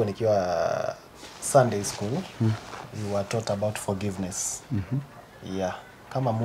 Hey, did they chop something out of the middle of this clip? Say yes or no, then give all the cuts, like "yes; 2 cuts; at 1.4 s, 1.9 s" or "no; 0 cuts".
no; 0 cuts